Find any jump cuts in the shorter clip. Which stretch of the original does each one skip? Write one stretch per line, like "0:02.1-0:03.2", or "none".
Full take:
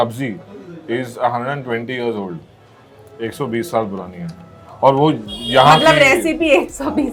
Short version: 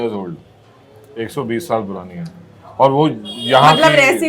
none